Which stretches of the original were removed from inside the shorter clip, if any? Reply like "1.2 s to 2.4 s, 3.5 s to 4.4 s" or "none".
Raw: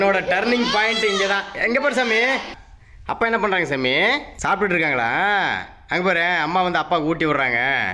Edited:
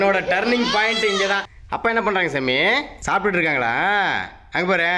1.5 s to 2.9 s